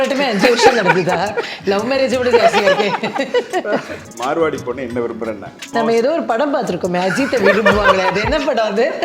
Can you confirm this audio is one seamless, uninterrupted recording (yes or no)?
no